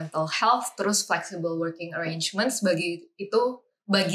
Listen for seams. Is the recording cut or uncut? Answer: uncut